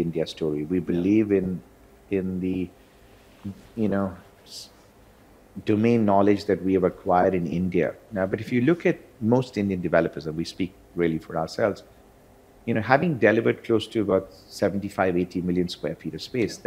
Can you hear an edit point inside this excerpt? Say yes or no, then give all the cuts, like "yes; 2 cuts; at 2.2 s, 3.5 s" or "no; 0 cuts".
no; 0 cuts